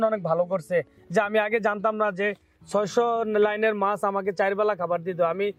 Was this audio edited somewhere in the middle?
no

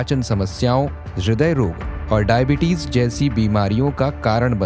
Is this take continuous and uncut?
no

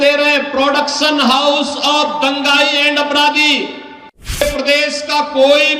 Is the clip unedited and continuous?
no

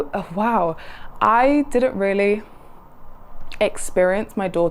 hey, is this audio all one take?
yes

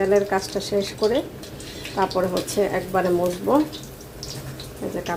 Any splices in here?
no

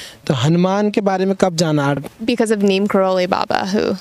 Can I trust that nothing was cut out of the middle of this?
no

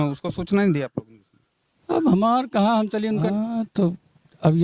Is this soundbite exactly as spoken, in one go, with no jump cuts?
no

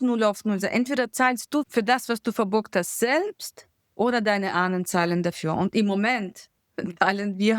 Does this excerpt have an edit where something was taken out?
yes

